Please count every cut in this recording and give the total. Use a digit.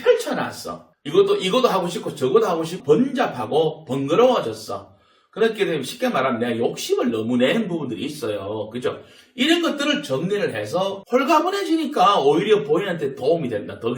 2